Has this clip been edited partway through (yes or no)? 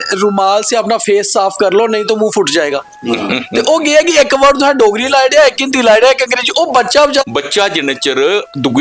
yes